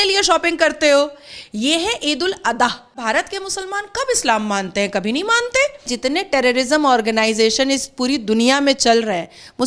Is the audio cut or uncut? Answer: cut